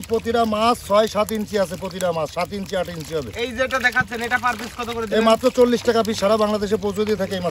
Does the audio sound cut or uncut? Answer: uncut